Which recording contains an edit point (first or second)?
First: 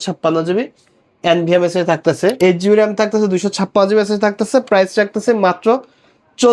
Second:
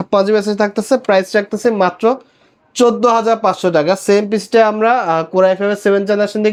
first